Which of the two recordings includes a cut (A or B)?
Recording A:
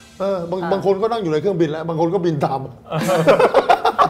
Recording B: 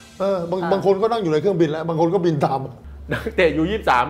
B